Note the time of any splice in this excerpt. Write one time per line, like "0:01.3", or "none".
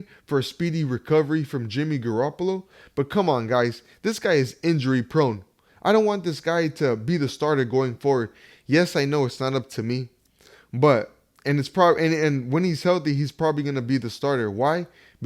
none